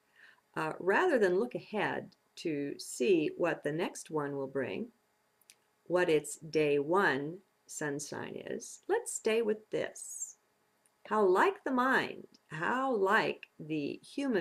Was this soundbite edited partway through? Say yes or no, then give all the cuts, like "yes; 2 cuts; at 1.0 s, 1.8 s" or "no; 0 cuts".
no; 0 cuts